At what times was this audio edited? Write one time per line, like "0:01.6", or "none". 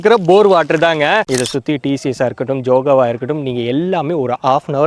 0:01.2